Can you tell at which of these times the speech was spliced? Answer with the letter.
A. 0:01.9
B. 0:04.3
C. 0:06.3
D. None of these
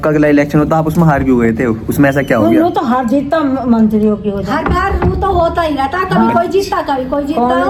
D